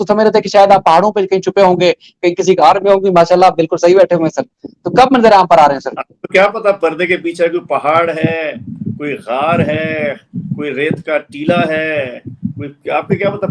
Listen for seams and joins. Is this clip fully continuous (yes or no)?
yes